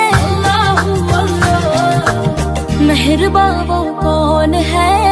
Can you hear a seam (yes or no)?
no